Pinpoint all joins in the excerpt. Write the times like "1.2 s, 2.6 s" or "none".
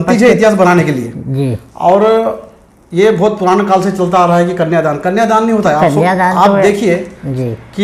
none